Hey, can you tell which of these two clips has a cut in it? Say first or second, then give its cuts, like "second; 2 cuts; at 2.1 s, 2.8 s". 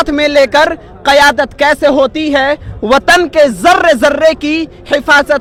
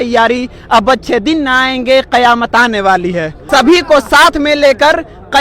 second; 1 cut; at 3.4 s